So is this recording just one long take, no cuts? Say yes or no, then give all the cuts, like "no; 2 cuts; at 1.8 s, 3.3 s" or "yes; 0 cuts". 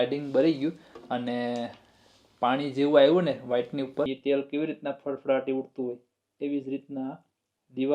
no; 1 cut; at 4.1 s